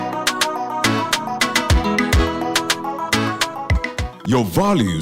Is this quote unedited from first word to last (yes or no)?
no